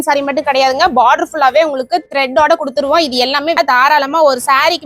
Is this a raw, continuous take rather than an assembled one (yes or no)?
no